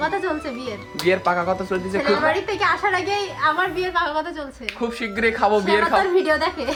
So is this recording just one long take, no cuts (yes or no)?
yes